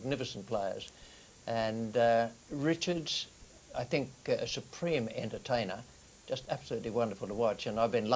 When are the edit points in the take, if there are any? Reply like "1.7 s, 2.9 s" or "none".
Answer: 4.6 s